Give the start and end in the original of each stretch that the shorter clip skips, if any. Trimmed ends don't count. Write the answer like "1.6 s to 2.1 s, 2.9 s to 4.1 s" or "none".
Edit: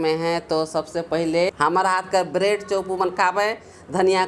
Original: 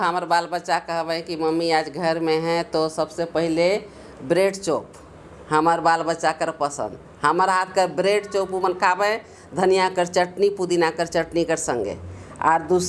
3.7 s to 7.1 s

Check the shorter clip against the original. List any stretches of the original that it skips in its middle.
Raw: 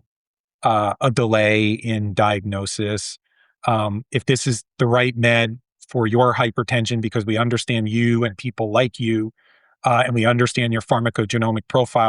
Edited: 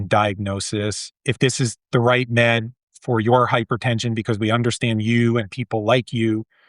3.2 s to 4.0 s

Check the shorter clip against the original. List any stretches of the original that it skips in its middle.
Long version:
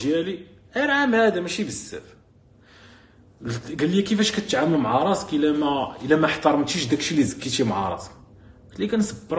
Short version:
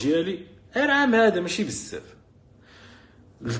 none

